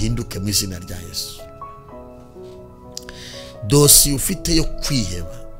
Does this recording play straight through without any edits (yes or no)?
yes